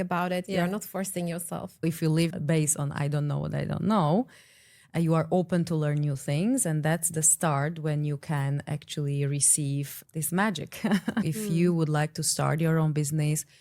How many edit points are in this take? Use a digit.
2